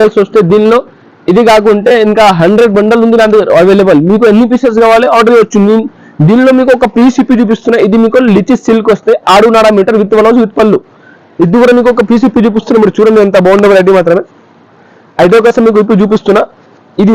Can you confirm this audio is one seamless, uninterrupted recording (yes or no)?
yes